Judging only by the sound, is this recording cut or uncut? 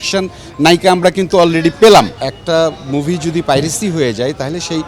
cut